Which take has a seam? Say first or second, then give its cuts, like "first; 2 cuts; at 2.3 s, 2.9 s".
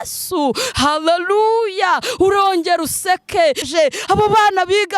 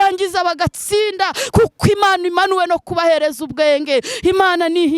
first; 1 cut; at 3.7 s